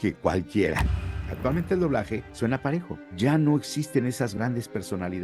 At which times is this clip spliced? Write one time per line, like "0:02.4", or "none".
0:01.1
0:02.3
0:03.0

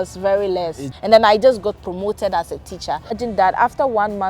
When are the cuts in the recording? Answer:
0:00.9
0:03.2

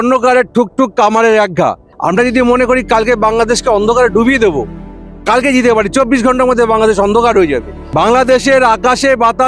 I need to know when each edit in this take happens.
0:01.9
0:07.8

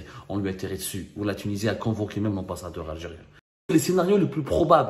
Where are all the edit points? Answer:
0:03.7

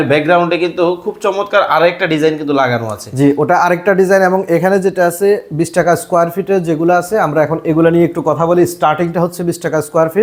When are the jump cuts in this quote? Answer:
none

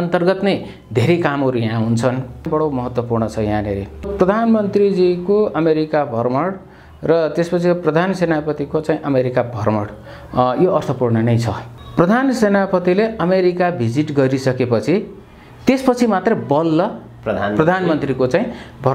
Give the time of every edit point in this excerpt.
0:02.4
0:04.1
0:11.7

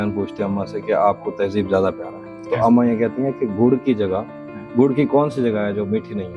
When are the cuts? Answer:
none

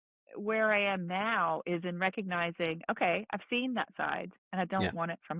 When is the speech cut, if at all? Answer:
0:04.4

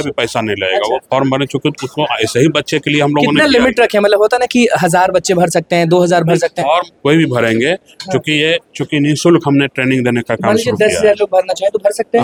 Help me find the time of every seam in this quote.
none

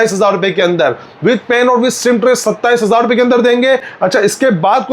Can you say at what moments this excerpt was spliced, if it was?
none

